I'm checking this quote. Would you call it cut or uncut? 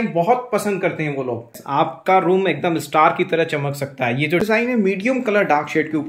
cut